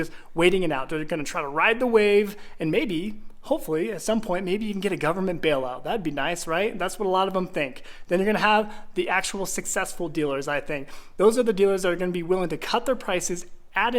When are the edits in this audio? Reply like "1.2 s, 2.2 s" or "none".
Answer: none